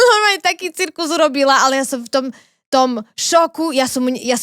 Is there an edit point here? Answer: no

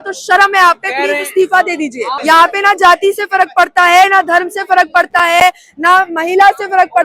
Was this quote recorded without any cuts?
no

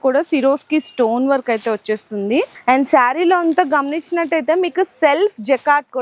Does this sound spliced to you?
yes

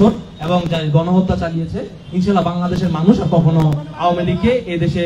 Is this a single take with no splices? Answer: yes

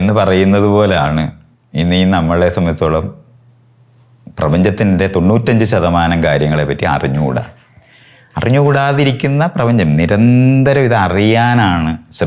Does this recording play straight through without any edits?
yes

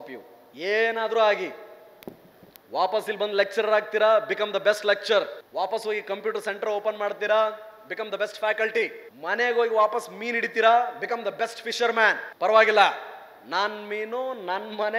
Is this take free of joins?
no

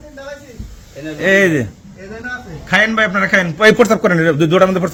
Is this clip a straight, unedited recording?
yes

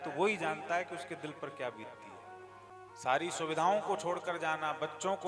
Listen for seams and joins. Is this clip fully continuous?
no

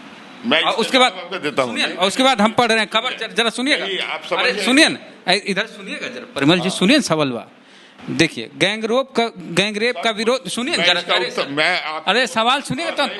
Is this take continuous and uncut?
yes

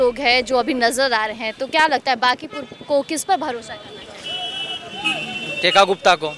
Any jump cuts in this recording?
no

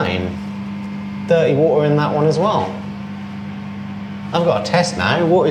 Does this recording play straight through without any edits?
yes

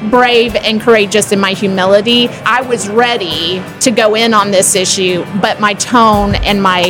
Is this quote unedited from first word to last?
no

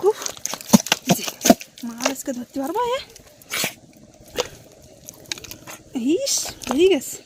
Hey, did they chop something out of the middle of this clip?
no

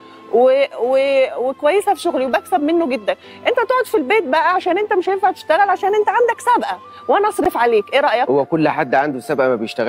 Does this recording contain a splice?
no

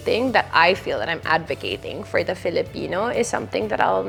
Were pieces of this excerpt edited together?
no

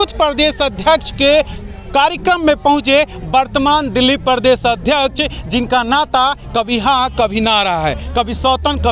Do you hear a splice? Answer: no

